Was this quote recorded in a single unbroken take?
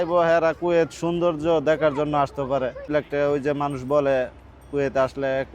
no; 1 cut; at 2.9 s

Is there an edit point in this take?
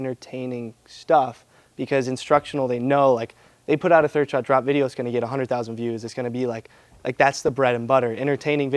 no; 0 cuts

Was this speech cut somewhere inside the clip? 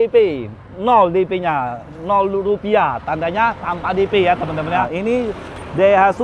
yes; 1 cut; at 4.9 s

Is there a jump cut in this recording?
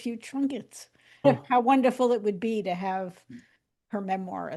yes; 1 cut; at 1.2 s

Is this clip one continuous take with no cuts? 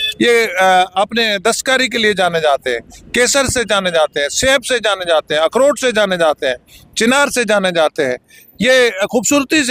yes; 0 cuts

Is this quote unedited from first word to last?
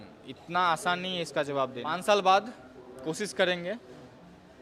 no; 1 cut; at 1.8 s

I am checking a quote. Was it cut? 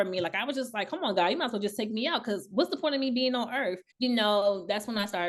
no; 0 cuts

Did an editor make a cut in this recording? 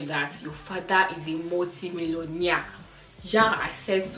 no; 0 cuts

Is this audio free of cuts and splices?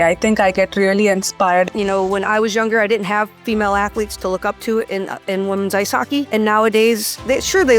no; 1 cut; at 1.7 s

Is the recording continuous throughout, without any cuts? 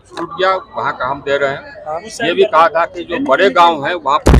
yes; 0 cuts

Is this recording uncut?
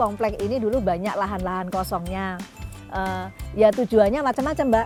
yes; 0 cuts

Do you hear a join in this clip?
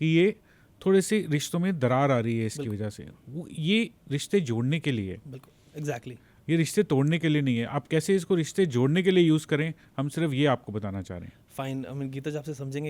no; 0 cuts

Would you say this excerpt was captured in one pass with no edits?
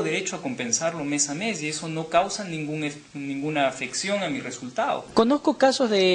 no; 1 cut; at 5.0 s

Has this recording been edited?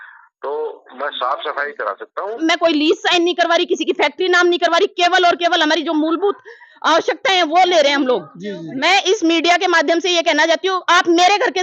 yes; 2 cuts; at 2.4 s, 8.7 s

